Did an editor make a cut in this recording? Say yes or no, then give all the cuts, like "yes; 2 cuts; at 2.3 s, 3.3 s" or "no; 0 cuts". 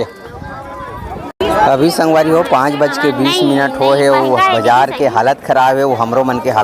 yes; 1 cut; at 1.3 s